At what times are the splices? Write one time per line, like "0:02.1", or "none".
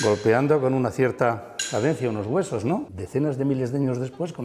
0:03.0